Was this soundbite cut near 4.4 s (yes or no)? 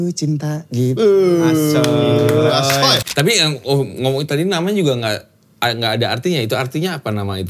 no